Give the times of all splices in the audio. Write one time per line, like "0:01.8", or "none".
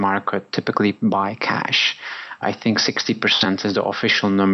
0:03.5

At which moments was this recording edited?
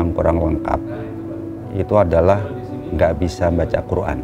none

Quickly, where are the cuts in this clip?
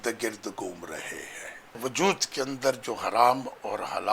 0:01.8

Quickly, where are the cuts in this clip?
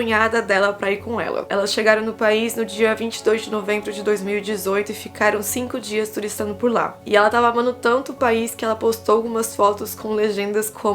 0:01.4
0:06.9

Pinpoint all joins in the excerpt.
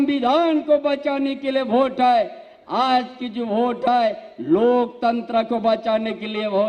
none

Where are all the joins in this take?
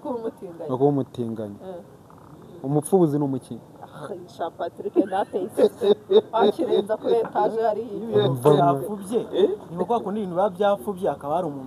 none

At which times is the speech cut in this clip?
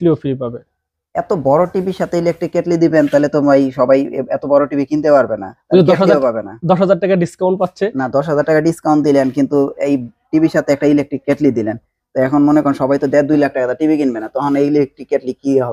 none

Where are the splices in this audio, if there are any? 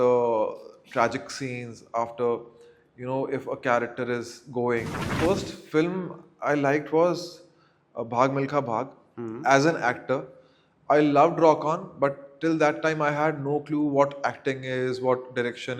0:05.2

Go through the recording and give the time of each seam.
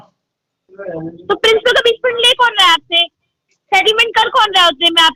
none

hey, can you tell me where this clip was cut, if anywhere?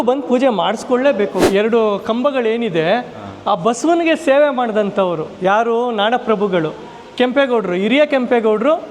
0:01.4

